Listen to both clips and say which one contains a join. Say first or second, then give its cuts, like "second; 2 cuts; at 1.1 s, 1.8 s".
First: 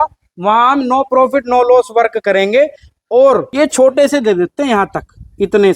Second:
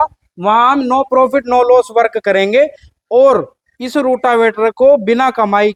first; 1 cut; at 3.5 s